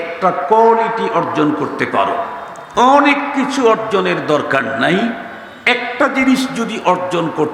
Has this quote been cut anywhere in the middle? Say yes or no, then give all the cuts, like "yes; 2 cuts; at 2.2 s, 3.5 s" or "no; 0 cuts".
no; 0 cuts